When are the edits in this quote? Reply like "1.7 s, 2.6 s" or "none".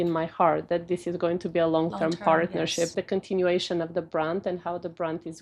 3.0 s